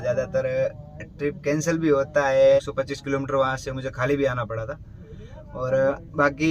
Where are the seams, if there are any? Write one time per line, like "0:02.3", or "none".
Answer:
0:02.6